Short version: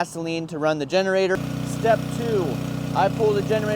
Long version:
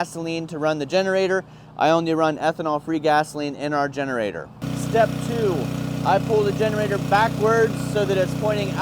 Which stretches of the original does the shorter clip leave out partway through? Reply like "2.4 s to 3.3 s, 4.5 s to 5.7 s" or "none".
1.4 s to 4.5 s